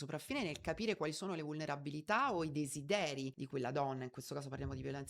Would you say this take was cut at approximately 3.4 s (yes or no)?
yes